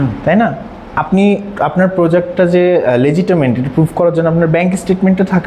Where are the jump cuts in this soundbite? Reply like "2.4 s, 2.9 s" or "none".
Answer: none